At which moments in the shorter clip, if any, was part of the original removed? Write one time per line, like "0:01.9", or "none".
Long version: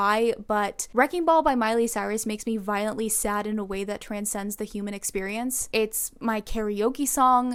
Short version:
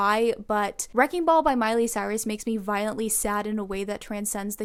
none